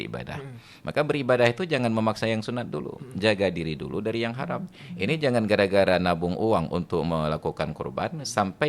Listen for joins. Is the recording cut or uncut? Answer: uncut